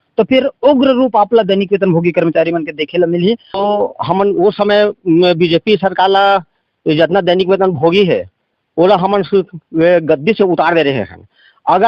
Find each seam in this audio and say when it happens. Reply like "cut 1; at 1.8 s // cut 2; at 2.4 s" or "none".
cut 1; at 3.6 s